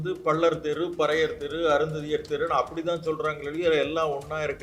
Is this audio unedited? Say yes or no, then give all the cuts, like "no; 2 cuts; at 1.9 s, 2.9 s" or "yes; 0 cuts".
yes; 0 cuts